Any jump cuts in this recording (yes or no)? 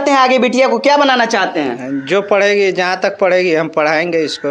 no